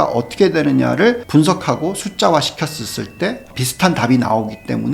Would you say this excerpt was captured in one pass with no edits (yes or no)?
no